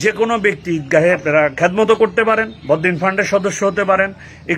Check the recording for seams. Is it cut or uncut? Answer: cut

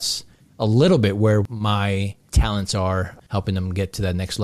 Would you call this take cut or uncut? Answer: cut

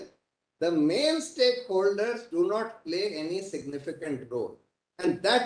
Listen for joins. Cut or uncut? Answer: uncut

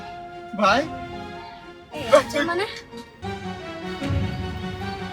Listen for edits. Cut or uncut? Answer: cut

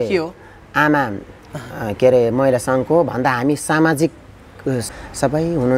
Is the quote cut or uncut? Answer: cut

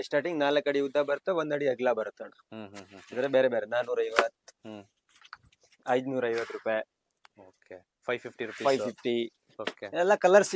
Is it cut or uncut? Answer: uncut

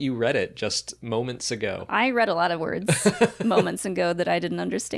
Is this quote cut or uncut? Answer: uncut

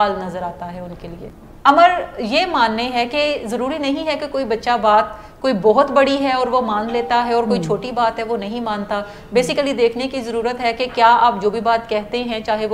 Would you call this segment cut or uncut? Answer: uncut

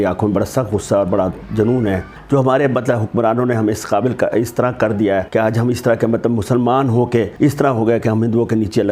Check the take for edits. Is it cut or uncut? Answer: cut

